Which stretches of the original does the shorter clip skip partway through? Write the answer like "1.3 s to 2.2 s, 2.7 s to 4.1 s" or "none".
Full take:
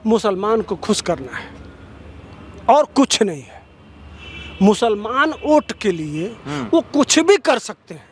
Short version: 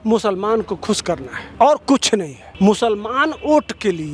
1.4 s to 2.4 s, 3.5 s to 4.4 s